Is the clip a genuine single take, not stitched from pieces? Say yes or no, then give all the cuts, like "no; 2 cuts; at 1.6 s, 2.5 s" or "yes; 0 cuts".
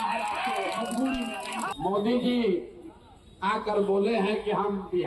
no; 1 cut; at 1.7 s